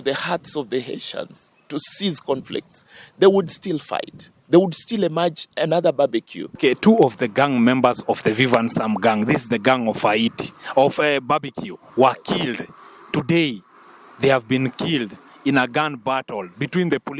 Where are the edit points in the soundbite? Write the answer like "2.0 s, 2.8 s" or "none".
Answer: 6.6 s